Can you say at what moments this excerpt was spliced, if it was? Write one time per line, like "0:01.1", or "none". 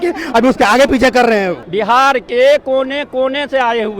0:01.6

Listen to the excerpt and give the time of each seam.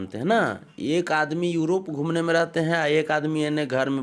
none

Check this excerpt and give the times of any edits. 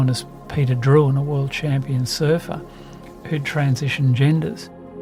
none

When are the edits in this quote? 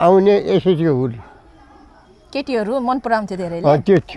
none

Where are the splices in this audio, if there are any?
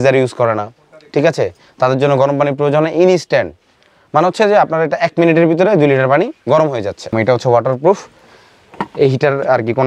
0:07.1

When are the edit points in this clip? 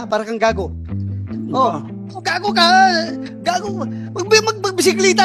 none

